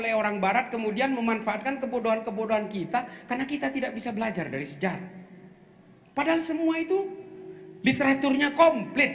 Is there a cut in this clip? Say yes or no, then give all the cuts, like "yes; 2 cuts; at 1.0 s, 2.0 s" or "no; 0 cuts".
no; 0 cuts